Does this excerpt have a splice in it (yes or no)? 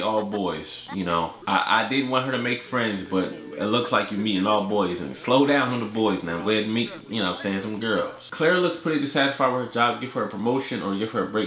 yes